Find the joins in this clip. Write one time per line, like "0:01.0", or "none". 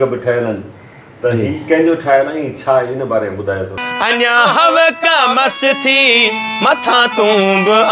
0:03.8